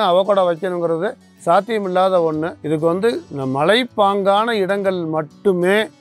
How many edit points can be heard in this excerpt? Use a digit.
2